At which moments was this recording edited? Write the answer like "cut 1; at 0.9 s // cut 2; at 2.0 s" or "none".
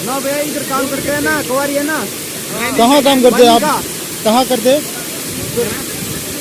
none